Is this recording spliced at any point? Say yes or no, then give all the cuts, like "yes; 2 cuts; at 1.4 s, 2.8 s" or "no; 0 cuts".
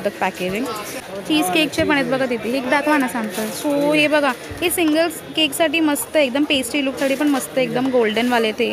yes; 1 cut; at 0.9 s